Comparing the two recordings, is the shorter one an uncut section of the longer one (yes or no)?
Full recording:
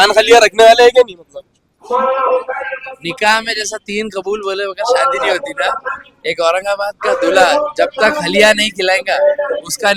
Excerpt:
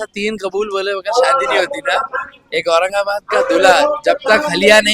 yes